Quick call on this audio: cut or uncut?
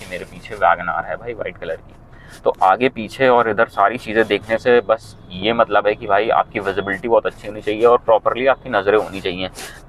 uncut